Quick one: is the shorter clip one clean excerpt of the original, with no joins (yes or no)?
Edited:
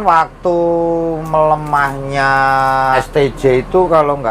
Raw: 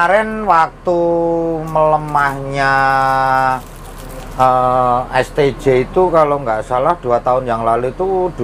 no